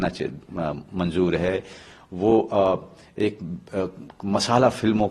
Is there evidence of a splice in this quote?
no; 0 cuts

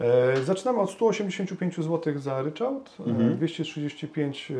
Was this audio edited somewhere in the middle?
no; 0 cuts

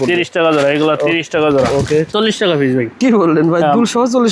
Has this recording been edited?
yes; 1 cut; at 2.1 s

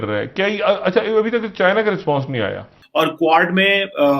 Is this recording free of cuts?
no; 1 cut; at 2.7 s

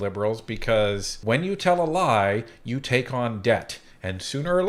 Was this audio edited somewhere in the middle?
yes; 1 cut; at 1.1 s

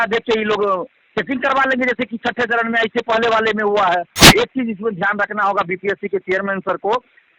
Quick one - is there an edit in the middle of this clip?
yes; 1 cut; at 4.1 s

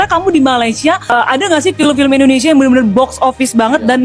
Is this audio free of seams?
no; 1 cut; at 1.1 s

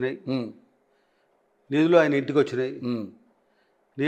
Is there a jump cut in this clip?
no; 0 cuts

